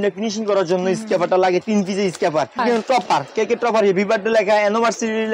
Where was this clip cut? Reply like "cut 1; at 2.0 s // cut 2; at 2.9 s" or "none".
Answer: cut 1; at 2.6 s